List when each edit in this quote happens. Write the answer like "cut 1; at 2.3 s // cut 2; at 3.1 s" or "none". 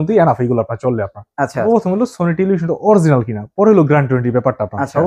cut 1; at 1.6 s